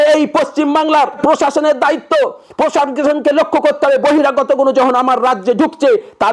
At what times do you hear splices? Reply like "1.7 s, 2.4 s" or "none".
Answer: 1.2 s